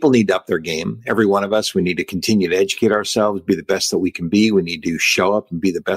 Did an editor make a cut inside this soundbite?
no; 0 cuts

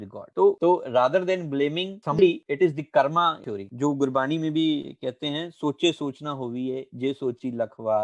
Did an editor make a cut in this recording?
yes; 1 cut; at 2.2 s

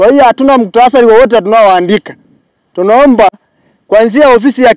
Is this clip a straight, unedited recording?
yes; 0 cuts

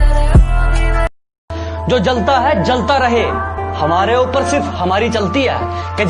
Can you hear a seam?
yes; 1 cut; at 1.1 s

